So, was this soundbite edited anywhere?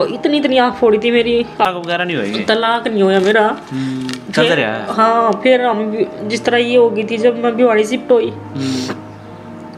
yes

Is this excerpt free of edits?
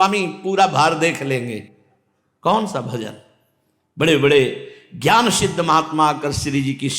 yes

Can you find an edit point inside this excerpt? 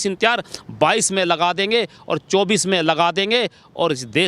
no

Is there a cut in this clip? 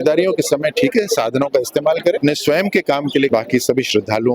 yes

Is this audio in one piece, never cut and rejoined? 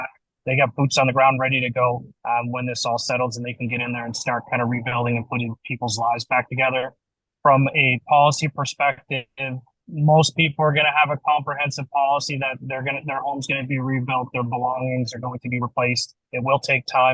no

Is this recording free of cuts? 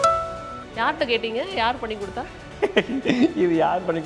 no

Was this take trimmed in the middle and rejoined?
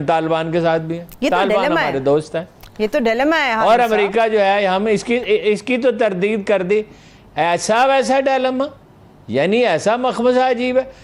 no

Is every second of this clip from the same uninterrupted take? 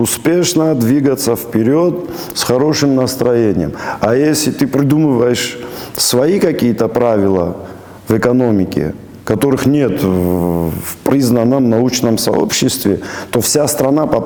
yes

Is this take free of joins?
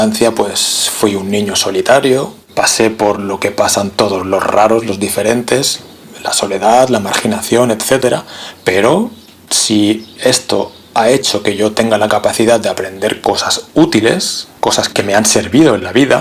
no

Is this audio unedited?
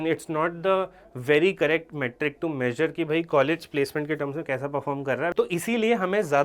no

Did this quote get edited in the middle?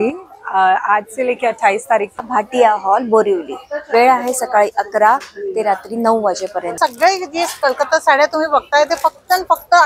yes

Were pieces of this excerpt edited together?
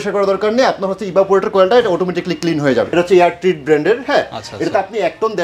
yes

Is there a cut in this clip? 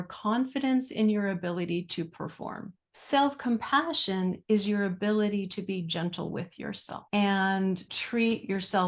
yes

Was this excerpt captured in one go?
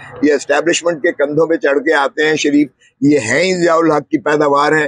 yes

